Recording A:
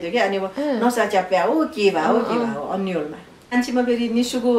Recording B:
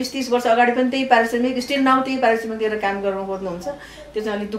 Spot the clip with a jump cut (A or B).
A